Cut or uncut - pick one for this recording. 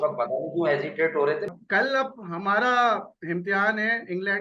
cut